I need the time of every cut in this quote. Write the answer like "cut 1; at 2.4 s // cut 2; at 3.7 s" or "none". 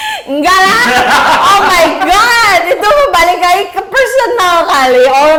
none